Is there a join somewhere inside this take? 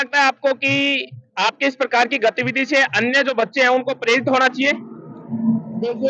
no; 0 cuts

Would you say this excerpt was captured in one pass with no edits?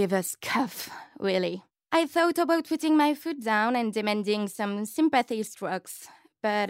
no; 1 cut; at 1.7 s

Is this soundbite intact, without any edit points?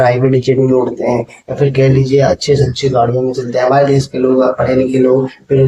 yes; 0 cuts

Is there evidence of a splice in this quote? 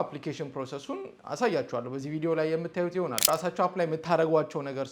yes; 1 cut; at 3.2 s

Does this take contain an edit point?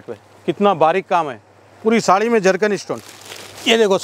no; 0 cuts

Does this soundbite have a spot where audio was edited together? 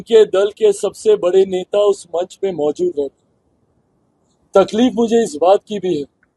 no; 0 cuts

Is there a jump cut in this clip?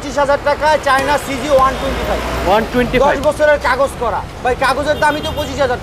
no; 0 cuts

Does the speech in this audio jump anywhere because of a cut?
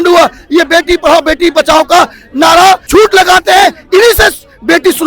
yes; 1 cut; at 2.9 s

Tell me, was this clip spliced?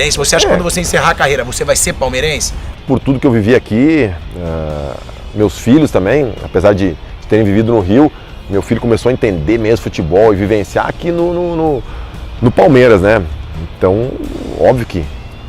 yes; 1 cut; at 2.8 s

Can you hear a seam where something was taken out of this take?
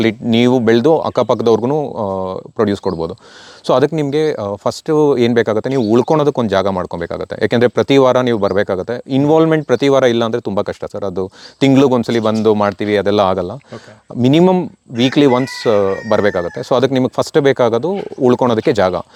no; 0 cuts

